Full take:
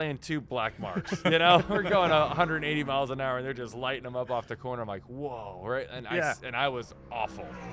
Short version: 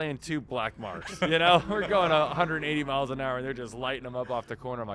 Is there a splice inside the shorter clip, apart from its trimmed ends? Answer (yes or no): no